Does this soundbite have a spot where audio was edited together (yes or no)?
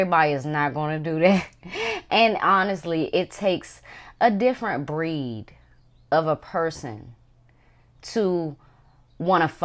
no